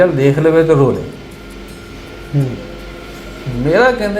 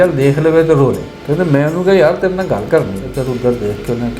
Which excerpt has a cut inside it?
second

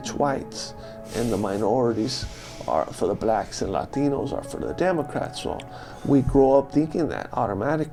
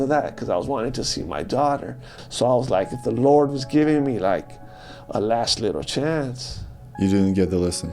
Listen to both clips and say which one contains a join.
second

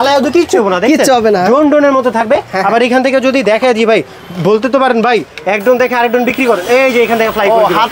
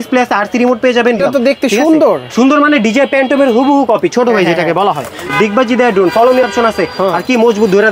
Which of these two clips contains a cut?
second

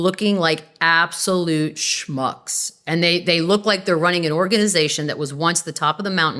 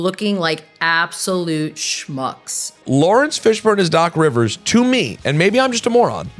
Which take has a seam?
second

